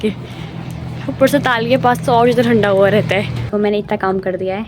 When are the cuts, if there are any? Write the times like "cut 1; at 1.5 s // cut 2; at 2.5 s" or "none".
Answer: cut 1; at 3.4 s